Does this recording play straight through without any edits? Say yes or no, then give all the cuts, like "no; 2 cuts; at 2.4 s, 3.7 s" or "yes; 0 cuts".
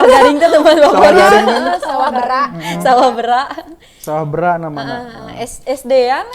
yes; 0 cuts